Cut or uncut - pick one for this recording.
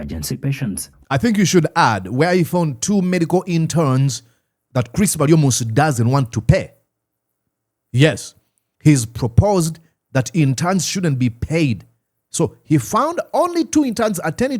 uncut